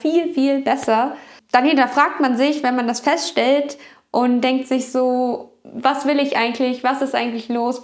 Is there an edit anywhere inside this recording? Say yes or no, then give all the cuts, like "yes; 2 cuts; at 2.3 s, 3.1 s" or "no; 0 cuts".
yes; 1 cut; at 1.3 s